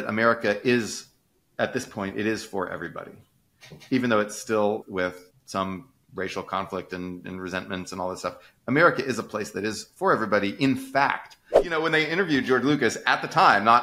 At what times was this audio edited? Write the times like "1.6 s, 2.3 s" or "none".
4.8 s, 11.7 s